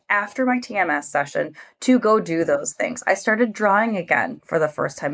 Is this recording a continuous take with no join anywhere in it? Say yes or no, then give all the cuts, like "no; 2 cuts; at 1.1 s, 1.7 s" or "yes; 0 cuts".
yes; 0 cuts